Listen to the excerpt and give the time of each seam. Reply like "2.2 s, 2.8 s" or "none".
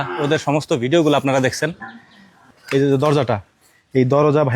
2.5 s